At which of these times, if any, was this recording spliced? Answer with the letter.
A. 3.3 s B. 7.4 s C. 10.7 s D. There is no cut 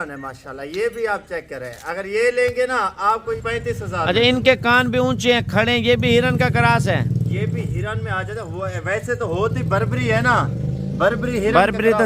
A